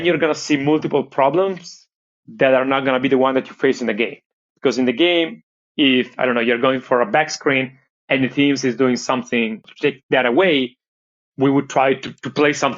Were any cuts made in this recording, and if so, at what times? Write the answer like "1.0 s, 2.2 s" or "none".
9.7 s